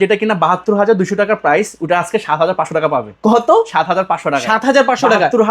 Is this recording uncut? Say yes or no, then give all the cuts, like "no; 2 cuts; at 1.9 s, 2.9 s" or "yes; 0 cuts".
yes; 0 cuts